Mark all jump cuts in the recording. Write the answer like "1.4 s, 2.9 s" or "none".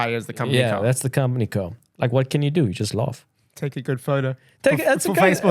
1.8 s

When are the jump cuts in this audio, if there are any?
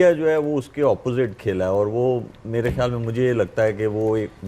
none

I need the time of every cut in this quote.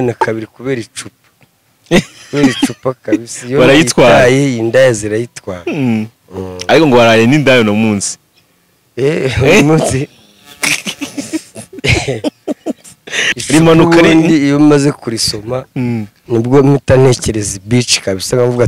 13.2 s

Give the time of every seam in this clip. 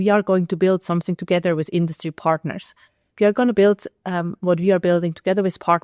none

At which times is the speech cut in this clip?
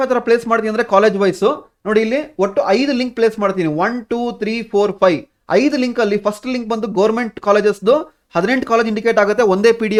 none

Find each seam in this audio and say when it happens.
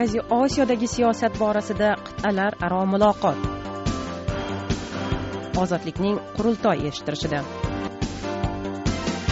8.0 s

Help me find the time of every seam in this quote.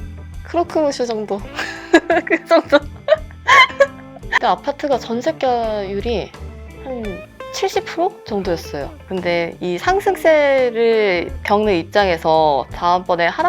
4.3 s

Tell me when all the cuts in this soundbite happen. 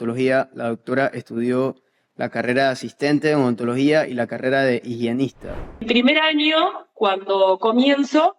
5.8 s

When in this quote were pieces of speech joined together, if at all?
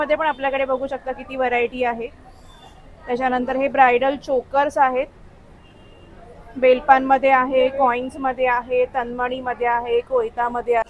none

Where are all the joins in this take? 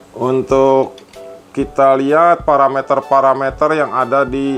none

